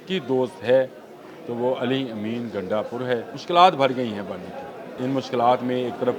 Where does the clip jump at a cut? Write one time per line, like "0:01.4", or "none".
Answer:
0:03.3
0:04.9